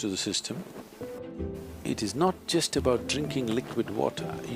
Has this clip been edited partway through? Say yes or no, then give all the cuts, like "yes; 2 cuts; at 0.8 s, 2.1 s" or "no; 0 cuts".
yes; 1 cut; at 1.2 s